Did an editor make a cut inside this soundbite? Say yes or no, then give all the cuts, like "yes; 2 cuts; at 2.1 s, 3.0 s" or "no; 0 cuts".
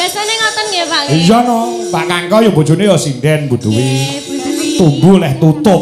no; 0 cuts